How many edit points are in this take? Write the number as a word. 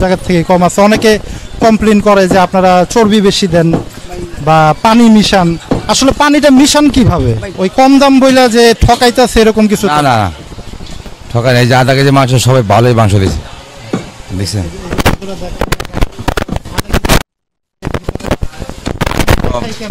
one